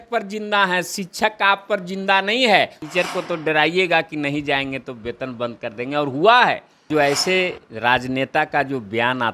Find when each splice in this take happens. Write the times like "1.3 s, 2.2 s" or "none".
2.8 s, 6.9 s